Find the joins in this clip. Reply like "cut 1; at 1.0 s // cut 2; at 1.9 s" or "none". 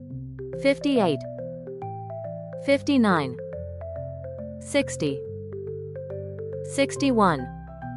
none